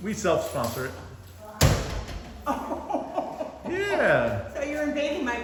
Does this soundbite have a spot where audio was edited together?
no; 0 cuts

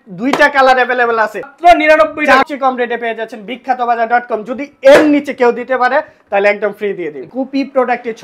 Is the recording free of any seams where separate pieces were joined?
no; 3 cuts; at 1.5 s, 2.4 s, 7.3 s

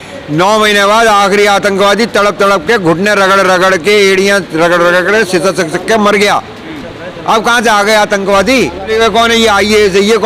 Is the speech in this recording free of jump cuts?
no; 1 cut; at 8.9 s

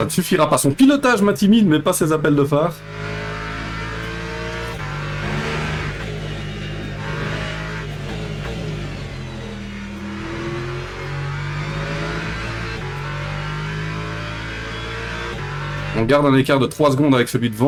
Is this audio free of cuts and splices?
yes; 0 cuts

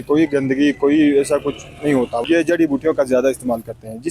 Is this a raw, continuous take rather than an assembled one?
no; 1 cut; at 2.2 s

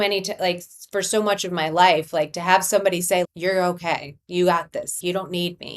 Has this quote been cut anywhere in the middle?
yes; 2 cuts; at 3.3 s, 4.9 s

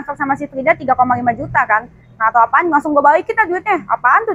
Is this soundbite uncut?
yes; 0 cuts

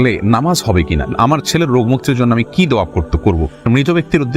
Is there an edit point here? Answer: yes; 2 cuts; at 1.1 s, 3.6 s

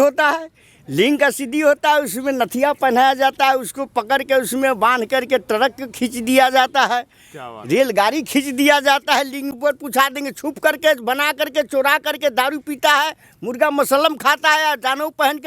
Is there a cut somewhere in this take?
yes; 1 cut; at 9.5 s

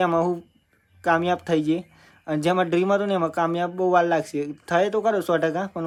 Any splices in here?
no; 0 cuts

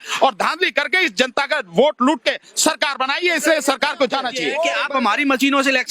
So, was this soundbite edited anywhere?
yes; 1 cut; at 4.8 s

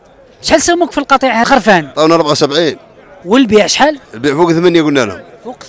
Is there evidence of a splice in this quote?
yes; 1 cut; at 1.5 s

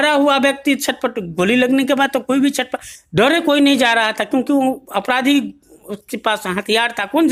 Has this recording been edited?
no; 0 cuts

